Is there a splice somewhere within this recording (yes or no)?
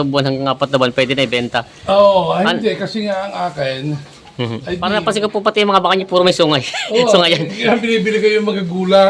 yes